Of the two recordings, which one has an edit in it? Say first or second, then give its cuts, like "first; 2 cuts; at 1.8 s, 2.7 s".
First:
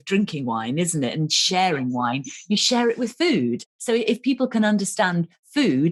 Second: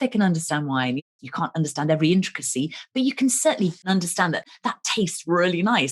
second; 2 cuts; at 1.0 s, 3.9 s